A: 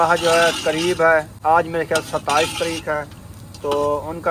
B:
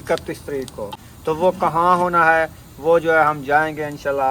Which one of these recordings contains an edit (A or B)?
B